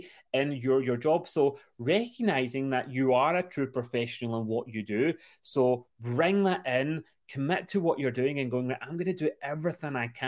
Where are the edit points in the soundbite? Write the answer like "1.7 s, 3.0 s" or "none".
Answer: none